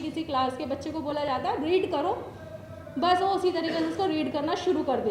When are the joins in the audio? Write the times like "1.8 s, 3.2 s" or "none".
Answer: none